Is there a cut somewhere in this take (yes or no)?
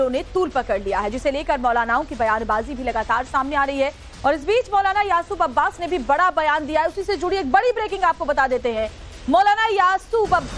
no